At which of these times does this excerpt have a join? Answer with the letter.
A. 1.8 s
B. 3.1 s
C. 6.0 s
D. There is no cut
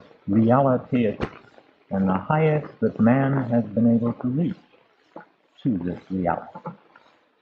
B